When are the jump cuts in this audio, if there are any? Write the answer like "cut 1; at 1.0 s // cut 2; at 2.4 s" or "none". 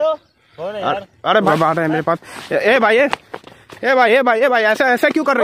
cut 1; at 1.5 s